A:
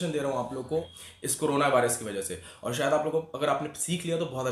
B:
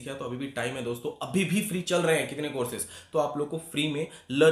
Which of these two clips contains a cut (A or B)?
A